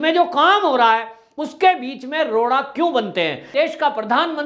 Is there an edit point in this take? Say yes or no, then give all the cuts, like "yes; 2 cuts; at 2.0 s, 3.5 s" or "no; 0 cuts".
yes; 1 cut; at 3.4 s